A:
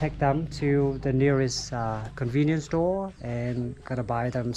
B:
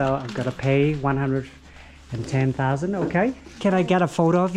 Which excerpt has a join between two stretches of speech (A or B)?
B